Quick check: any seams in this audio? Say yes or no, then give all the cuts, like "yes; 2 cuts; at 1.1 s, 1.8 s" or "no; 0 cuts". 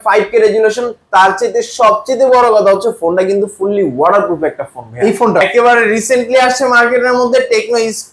yes; 1 cut; at 5.4 s